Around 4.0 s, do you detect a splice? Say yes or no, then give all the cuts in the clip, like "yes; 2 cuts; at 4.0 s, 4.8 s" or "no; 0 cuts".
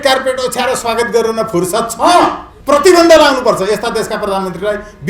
no; 1 cut; at 2.5 s